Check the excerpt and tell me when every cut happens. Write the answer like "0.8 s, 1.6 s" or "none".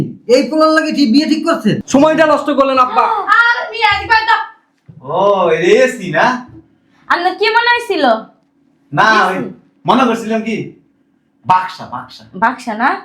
1.8 s